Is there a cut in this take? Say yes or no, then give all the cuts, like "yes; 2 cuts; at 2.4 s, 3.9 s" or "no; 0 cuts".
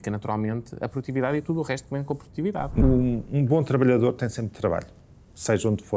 yes; 1 cut; at 2.8 s